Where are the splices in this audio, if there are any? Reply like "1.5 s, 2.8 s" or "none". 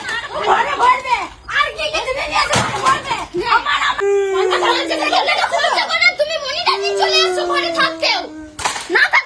4.0 s